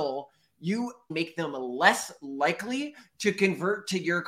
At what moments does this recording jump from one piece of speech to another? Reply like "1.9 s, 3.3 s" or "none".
1.1 s